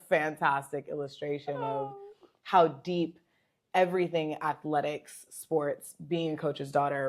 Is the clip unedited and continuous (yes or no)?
yes